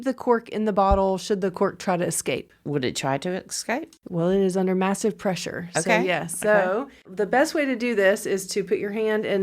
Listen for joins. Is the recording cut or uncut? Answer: cut